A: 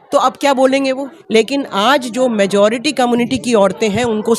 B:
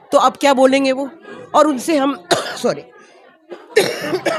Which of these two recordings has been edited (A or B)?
A